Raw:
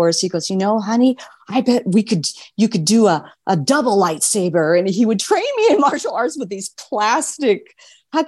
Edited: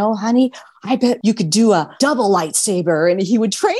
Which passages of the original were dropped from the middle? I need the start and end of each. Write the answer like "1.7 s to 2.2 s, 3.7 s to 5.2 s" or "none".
1.8 s to 2.5 s, 3.3 s to 3.6 s

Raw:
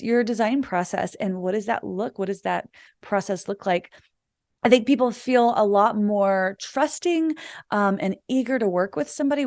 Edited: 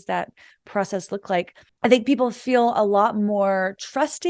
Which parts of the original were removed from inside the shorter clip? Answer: 4.0 s to 4.4 s

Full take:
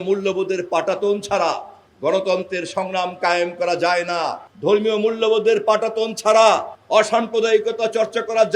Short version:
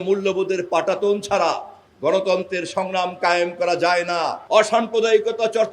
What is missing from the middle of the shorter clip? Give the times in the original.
4.4 s to 6.8 s

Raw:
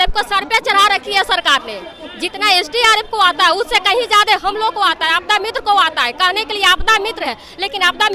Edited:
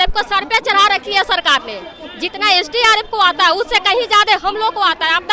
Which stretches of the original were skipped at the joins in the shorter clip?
none

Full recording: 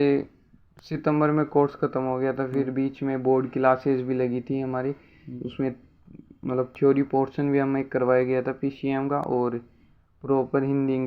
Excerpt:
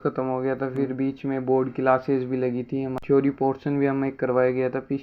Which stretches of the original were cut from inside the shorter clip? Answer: 4.8 s to 6.7 s

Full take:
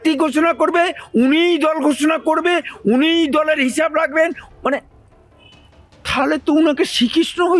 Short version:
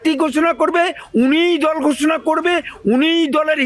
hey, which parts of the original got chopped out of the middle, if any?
none

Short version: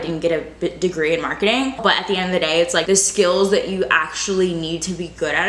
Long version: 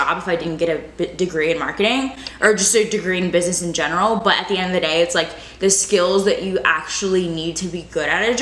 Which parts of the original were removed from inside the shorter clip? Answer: 2.2 s to 4.2 s, 5.3 s to 5.6 s

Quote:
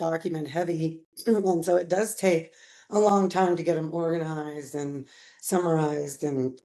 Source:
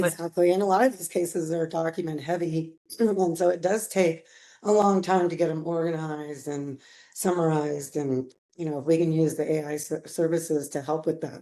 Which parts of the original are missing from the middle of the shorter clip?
none

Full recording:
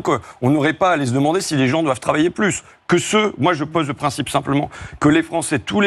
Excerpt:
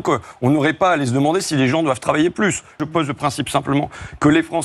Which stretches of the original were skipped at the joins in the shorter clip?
2.8 s to 3.6 s

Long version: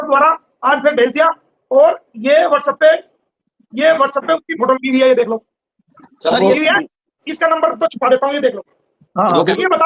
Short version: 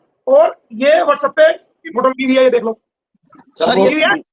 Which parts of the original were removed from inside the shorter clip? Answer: 3.3 s to 4.5 s

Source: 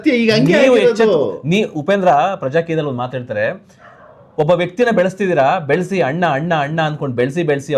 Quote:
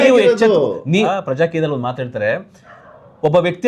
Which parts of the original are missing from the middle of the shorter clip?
1.7 s to 2.3 s

